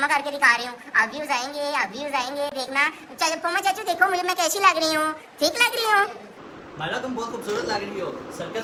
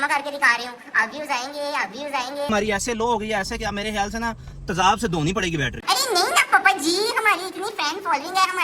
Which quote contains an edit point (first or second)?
second